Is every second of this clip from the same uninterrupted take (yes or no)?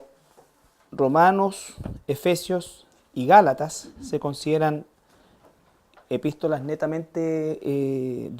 no